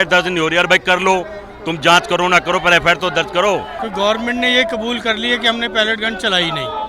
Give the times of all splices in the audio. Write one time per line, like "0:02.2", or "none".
0:03.8